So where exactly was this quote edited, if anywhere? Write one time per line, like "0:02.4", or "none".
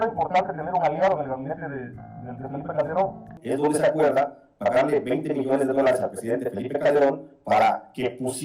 0:03.4